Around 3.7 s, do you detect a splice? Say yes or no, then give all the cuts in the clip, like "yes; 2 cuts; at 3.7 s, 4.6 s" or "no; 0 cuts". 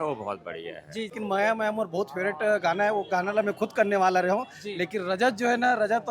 no; 1 cut; at 1.2 s